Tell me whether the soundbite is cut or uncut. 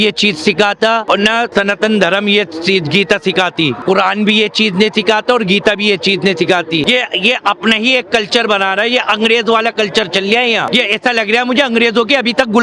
cut